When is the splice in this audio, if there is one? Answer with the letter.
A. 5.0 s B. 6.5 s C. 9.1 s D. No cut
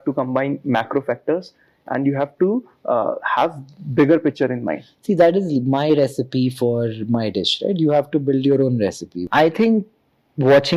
C